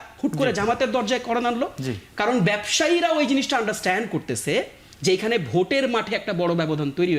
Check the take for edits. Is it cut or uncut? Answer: uncut